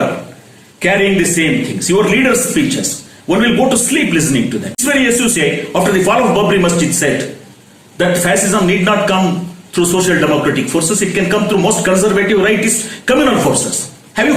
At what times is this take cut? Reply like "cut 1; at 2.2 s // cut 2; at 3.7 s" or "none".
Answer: cut 1; at 4.8 s